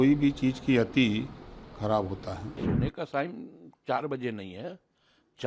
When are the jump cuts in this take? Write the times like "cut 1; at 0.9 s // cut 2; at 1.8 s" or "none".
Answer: cut 1; at 2.5 s